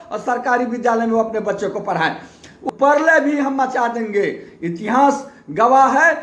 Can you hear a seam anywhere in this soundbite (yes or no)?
yes